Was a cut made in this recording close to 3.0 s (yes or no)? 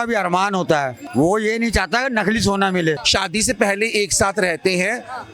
yes